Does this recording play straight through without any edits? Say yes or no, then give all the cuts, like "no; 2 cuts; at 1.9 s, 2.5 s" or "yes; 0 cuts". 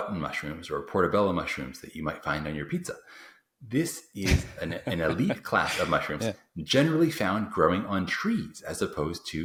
yes; 0 cuts